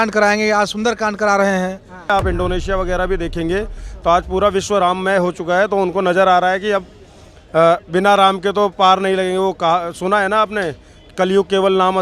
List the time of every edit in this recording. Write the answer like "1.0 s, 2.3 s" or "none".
2.1 s